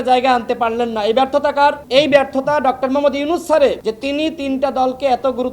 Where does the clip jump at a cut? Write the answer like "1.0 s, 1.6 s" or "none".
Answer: 1.8 s, 3.8 s